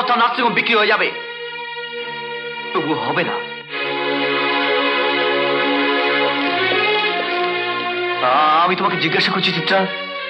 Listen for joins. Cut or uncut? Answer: uncut